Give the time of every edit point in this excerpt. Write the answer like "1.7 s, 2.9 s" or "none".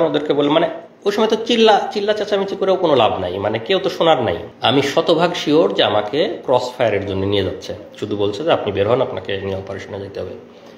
4.5 s

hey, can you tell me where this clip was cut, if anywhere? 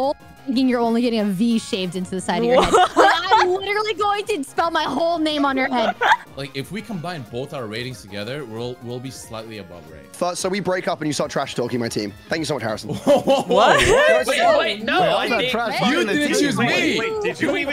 6.2 s, 10.1 s

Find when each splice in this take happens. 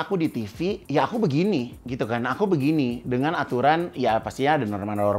0.8 s, 1.8 s

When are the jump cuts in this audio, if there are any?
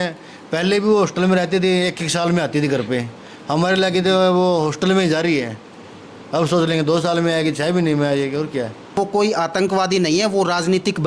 8.9 s

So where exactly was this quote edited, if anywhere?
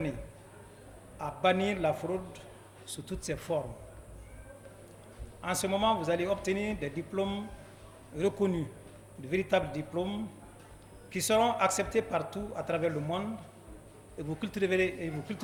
none

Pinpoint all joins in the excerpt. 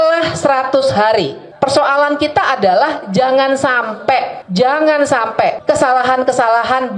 1.5 s, 5.6 s

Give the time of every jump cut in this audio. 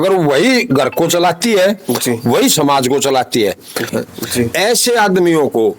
3.9 s

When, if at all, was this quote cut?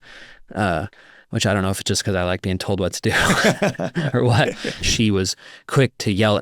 4.8 s

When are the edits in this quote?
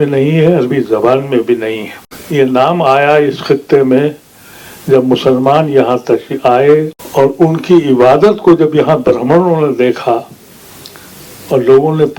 2.1 s, 7.0 s

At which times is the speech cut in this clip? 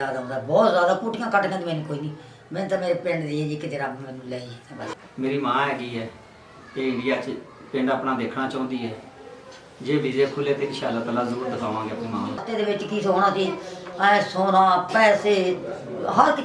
4.9 s, 12.4 s

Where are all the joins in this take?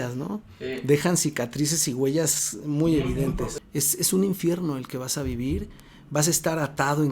3.6 s

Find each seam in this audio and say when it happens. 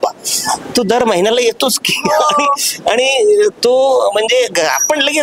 none

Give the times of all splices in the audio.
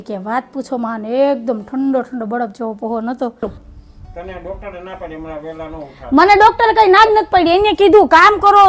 3.4 s

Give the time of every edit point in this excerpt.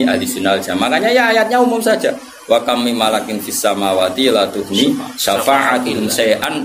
none

